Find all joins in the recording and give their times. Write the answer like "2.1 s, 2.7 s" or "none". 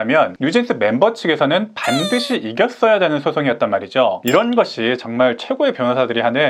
4.2 s

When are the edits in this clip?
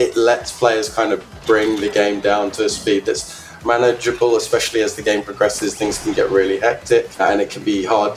7.2 s

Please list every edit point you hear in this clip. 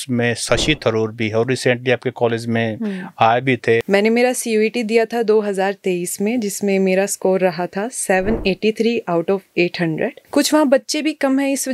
3.8 s, 10.2 s

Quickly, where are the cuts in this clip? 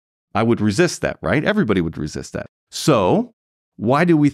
2.5 s

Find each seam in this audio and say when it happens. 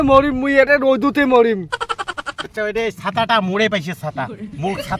2.6 s

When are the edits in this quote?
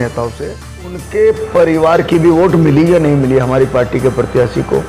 1.0 s

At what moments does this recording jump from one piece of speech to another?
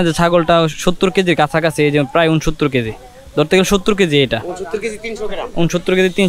none

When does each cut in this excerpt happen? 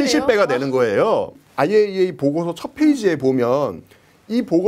1.3 s

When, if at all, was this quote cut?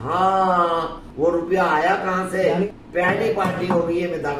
1.0 s, 2.7 s

